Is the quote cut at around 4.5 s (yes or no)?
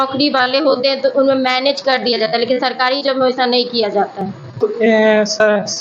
yes